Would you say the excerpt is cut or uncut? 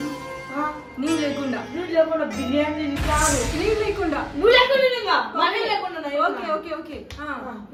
uncut